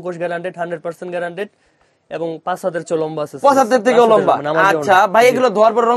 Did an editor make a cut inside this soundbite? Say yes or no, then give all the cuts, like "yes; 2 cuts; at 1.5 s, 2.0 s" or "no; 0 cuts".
no; 0 cuts